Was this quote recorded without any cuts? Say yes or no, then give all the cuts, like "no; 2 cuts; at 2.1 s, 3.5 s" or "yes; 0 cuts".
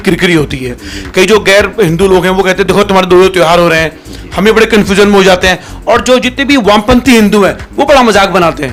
yes; 0 cuts